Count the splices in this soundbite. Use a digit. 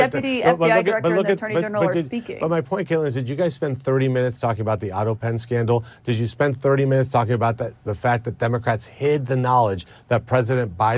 0